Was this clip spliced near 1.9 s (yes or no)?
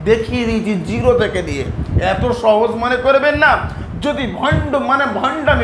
no